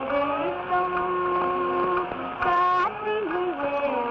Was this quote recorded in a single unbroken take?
yes; 0 cuts

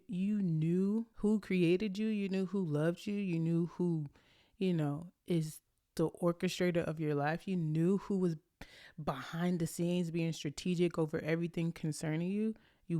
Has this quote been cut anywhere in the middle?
yes; 1 cut; at 1.1 s

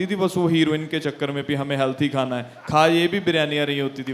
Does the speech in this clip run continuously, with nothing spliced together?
yes; 0 cuts

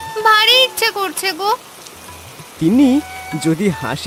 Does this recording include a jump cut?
no; 0 cuts

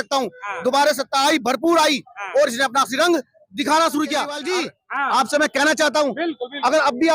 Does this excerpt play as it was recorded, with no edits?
no; 1 cut; at 4.4 s

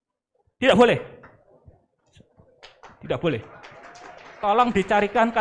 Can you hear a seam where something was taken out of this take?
no; 0 cuts

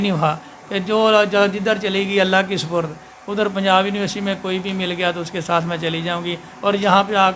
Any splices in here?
no; 0 cuts

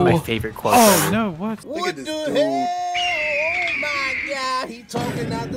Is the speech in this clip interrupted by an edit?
yes; 1 cut; at 1.6 s

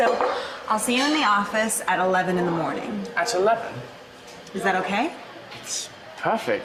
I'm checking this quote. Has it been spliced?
no; 0 cuts

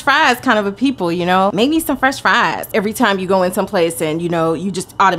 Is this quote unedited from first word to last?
no; 2 cuts; at 1.5 s, 2.7 s

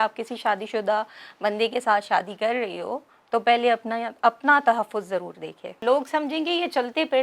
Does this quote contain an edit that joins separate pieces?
yes; 1 cut; at 5.8 s

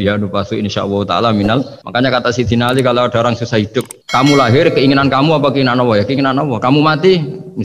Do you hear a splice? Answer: yes; 2 cuts; at 1.8 s, 4.0 s

